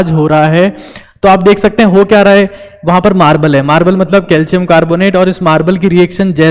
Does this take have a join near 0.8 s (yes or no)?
no